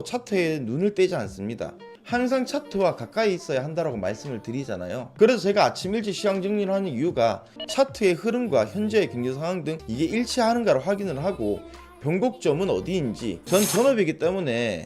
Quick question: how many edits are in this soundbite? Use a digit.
1